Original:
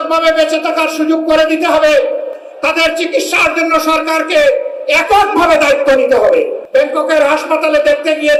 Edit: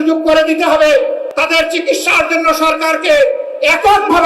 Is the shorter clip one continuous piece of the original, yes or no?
no